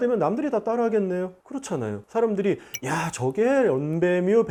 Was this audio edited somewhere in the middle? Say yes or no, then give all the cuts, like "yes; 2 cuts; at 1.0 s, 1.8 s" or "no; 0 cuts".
no; 0 cuts